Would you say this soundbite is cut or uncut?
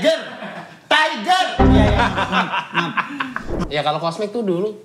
cut